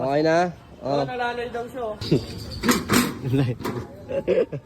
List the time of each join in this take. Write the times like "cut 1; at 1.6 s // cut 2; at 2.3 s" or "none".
cut 1; at 2.0 s